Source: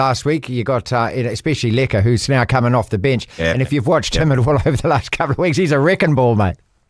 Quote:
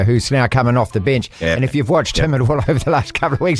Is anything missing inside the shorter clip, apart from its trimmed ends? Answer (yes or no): no